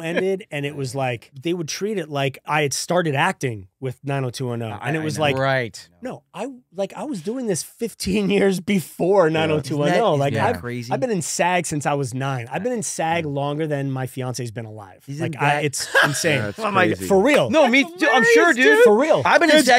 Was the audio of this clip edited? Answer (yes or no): yes